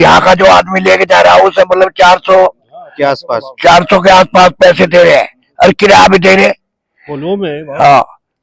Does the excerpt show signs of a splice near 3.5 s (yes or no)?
no